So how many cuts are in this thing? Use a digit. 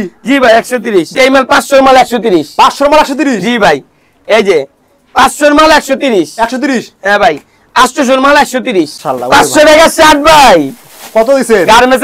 2